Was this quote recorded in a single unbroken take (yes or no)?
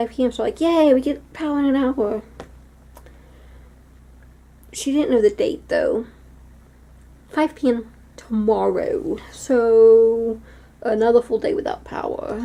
yes